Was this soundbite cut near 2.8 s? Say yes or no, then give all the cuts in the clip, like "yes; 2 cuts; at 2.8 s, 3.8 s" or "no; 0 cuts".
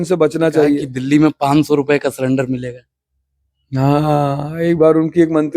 no; 1 cut; at 0.9 s